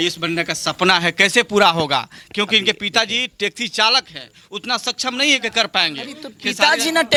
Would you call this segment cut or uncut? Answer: uncut